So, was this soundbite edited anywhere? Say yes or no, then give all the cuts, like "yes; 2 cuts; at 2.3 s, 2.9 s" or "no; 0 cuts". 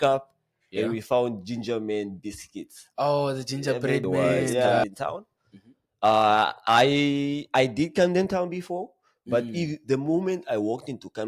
yes; 1 cut; at 4.8 s